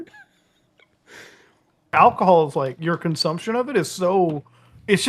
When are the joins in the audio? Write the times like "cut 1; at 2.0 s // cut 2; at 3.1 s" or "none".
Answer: cut 1; at 1.9 s